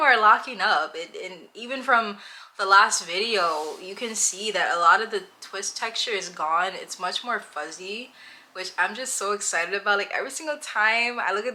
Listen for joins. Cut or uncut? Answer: uncut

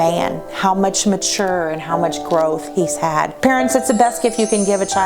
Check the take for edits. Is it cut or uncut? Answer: cut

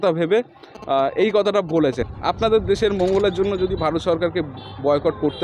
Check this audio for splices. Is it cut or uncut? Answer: cut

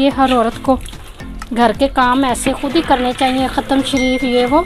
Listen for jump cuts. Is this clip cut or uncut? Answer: uncut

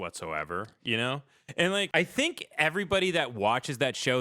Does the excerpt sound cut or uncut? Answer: cut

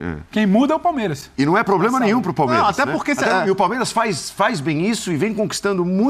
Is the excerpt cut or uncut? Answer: uncut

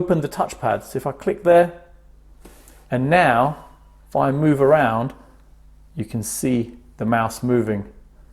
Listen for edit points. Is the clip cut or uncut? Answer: uncut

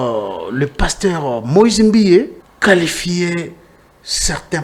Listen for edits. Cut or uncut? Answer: cut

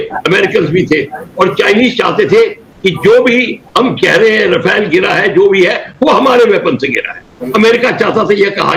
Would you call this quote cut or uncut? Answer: uncut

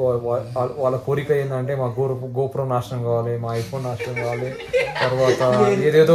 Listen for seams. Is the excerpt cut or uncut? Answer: uncut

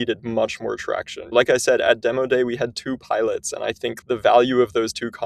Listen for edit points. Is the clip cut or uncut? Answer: cut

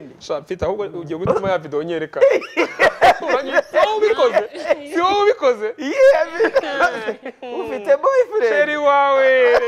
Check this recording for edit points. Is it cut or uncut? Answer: uncut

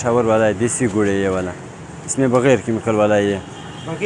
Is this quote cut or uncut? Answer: uncut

